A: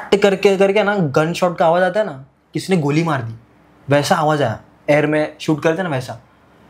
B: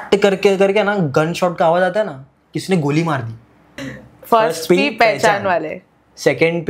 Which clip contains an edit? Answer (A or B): B